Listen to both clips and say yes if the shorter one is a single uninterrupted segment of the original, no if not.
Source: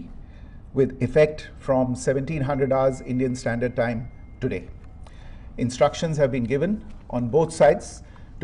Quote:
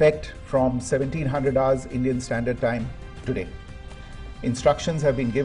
yes